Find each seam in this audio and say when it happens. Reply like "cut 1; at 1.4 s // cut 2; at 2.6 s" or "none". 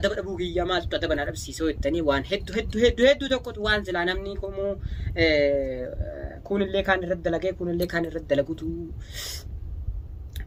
none